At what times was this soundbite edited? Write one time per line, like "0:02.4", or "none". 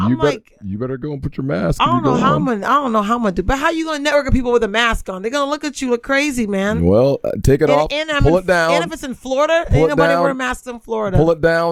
none

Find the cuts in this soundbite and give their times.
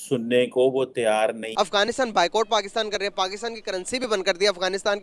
0:01.4

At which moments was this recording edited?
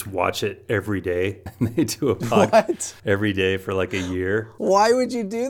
0:01.4
0:02.9
0:04.5

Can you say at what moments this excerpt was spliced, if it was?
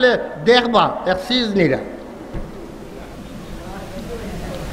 none

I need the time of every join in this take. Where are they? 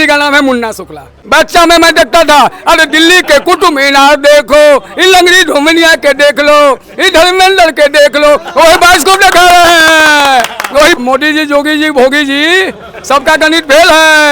0:01.2
0:11.0

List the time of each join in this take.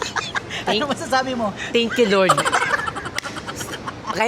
none

